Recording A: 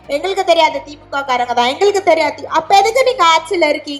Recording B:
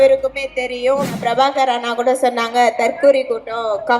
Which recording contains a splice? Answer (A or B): B